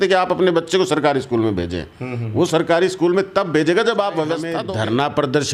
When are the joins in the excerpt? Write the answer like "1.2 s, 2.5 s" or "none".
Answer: 4.6 s

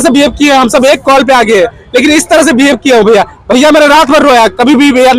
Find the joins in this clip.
none

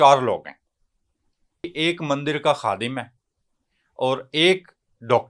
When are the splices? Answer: 1.6 s

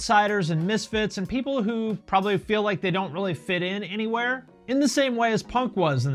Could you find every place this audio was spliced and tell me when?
none

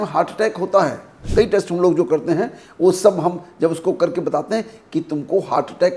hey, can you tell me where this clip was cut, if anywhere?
1.2 s

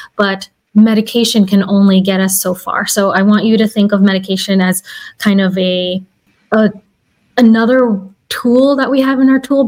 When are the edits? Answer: none

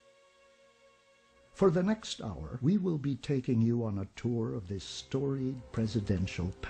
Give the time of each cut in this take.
2.6 s

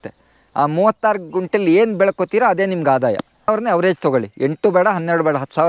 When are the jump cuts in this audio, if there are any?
3.5 s

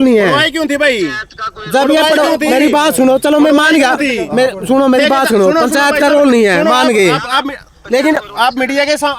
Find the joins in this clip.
none

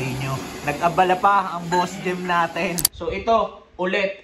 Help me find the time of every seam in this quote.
2.9 s

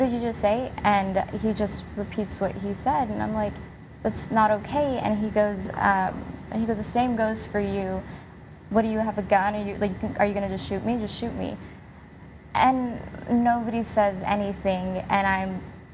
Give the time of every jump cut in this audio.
10.3 s

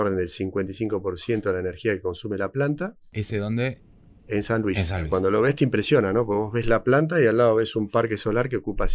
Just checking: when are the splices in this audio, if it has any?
5.1 s

